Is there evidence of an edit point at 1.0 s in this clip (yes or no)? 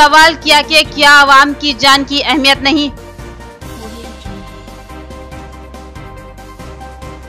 no